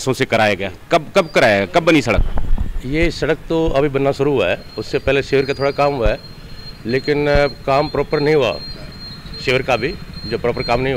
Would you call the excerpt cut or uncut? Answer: uncut